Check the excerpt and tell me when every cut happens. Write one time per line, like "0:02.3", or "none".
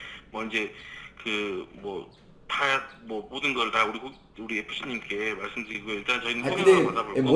0:05.8

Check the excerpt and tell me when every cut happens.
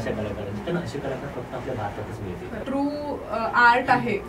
0:02.5

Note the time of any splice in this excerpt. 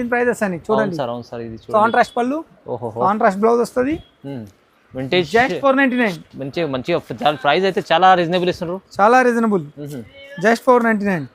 none

